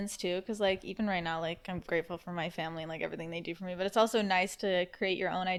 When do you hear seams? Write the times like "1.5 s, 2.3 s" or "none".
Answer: none